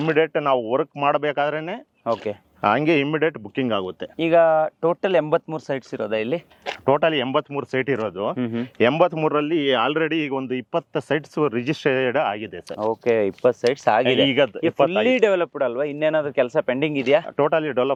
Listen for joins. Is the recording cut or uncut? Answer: uncut